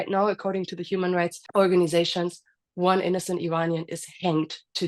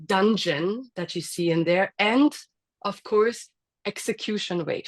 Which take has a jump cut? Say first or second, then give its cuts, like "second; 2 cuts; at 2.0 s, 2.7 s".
first; 1 cut; at 1.4 s